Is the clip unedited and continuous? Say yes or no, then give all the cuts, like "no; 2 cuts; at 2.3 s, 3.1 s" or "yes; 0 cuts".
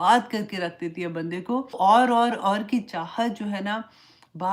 no; 1 cut; at 1.8 s